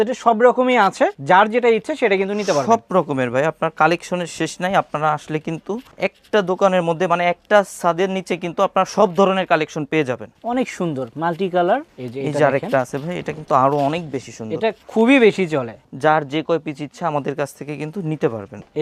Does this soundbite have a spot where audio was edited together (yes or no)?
no